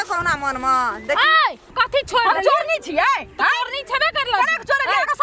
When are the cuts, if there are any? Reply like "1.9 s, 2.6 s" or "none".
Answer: 1.6 s